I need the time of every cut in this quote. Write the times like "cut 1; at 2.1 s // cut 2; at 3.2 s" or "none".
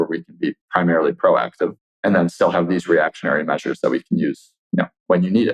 cut 1; at 1.9 s